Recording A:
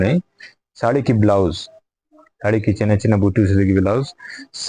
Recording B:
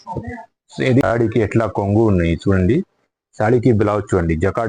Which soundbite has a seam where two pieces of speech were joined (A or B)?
B